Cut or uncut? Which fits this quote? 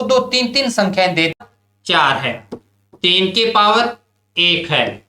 cut